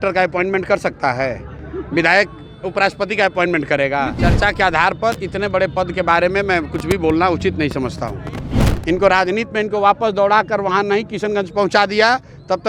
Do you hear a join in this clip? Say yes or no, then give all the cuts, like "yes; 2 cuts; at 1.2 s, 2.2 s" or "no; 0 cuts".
yes; 2 cuts; at 4.2 s, 8.5 s